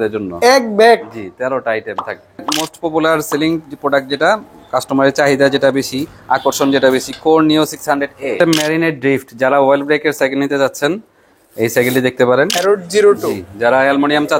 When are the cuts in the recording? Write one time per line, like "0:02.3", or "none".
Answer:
0:02.6
0:08.4
0:12.5